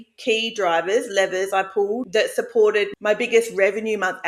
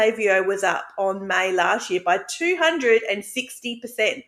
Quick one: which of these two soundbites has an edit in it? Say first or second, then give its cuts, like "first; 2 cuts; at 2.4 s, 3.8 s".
first; 2 cuts; at 2.0 s, 2.9 s